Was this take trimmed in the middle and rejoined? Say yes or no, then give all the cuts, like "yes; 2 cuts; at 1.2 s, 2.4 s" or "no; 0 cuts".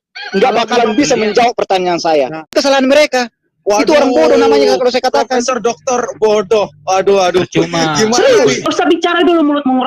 yes; 2 cuts; at 2.5 s, 8.6 s